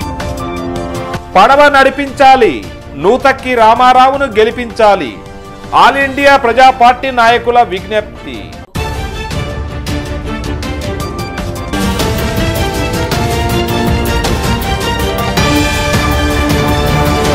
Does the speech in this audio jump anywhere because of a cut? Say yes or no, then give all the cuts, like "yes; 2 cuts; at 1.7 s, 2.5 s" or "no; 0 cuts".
yes; 1 cut; at 1.1 s